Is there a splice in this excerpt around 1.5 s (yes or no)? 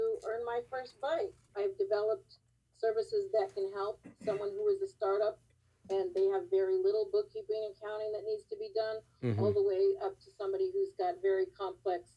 yes